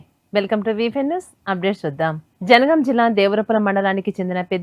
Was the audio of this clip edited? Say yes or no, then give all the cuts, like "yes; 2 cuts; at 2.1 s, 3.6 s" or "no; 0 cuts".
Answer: yes; 1 cut; at 2.3 s